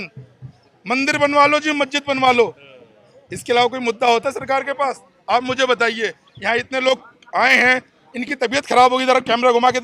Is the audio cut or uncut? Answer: uncut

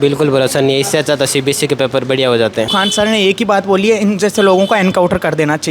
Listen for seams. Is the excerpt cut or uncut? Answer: cut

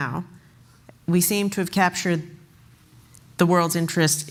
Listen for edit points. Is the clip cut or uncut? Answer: uncut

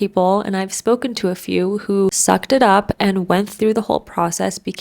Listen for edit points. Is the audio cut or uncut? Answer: cut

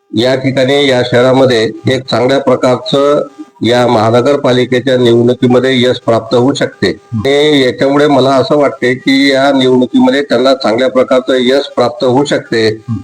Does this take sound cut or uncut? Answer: cut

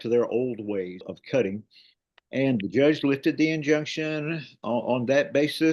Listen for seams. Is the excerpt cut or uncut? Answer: cut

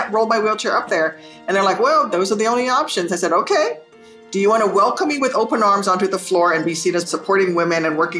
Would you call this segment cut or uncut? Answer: cut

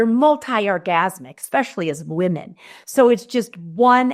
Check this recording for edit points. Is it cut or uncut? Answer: uncut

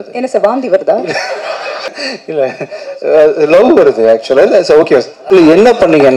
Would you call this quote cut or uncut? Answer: cut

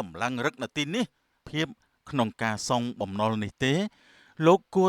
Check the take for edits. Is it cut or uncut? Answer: cut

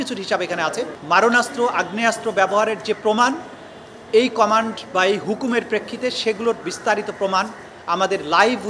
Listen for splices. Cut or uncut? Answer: cut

